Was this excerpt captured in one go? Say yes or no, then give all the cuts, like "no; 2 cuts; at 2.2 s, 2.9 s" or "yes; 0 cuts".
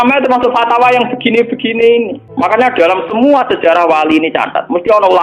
no; 1 cut; at 2.2 s